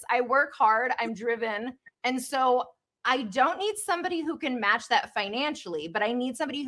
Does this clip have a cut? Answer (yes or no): no